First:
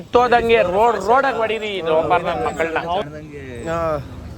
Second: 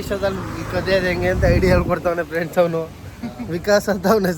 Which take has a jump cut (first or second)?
first